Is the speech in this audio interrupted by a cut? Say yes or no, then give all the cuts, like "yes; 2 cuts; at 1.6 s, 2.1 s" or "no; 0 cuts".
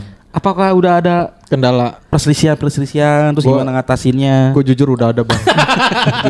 yes; 1 cut; at 2.0 s